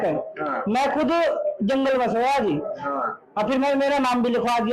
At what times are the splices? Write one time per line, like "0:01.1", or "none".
none